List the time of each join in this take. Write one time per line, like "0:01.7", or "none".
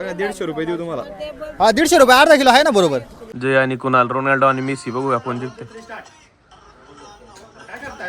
0:03.2